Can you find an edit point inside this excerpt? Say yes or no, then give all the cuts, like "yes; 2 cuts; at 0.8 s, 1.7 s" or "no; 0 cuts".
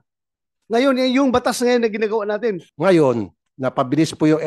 yes; 1 cut; at 2.7 s